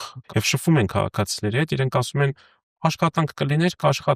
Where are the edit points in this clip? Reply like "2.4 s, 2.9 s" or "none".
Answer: none